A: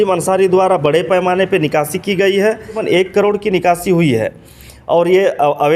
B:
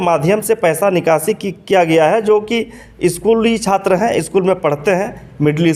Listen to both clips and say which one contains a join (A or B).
A